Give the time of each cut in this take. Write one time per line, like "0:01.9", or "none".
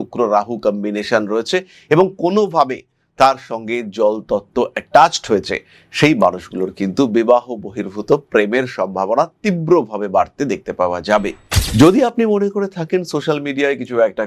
0:11.4